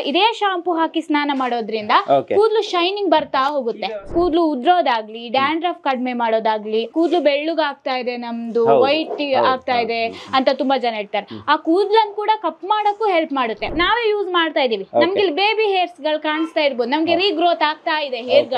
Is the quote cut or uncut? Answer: cut